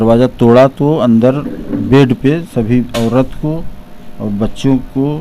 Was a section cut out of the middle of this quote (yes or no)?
no